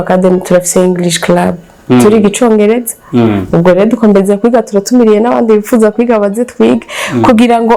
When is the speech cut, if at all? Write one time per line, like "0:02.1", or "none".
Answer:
none

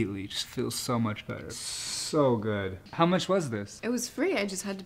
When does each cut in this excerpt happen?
none

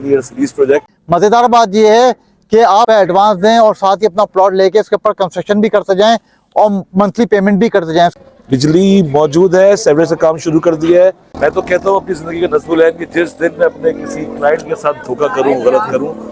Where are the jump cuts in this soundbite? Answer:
0:00.9
0:08.1
0:11.3

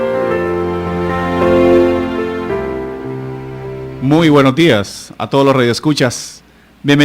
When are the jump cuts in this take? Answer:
0:03.9

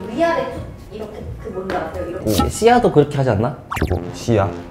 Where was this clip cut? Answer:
0:02.2

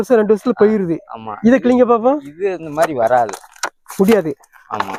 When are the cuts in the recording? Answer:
none

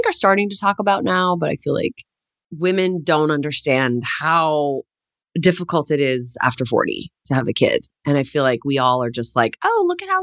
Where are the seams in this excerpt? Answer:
none

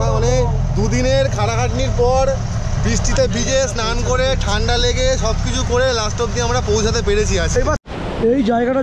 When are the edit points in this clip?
0:07.8

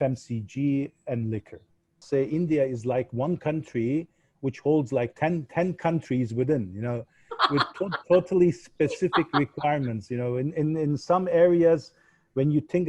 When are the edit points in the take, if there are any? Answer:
0:02.0

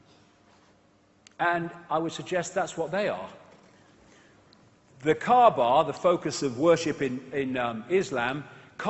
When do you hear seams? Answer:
0:04.0

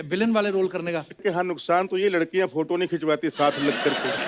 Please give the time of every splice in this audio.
0:01.2

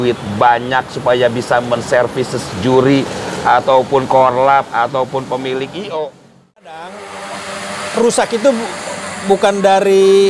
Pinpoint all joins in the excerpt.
0:06.6

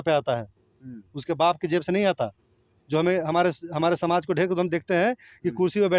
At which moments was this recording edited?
none

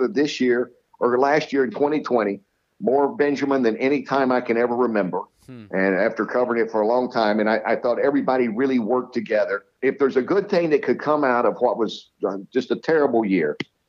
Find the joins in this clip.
0:09.6

